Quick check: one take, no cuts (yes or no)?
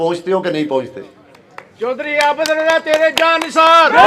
yes